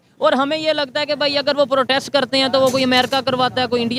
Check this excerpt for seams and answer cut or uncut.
uncut